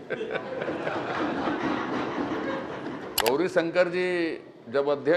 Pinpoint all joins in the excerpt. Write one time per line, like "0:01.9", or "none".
0:03.1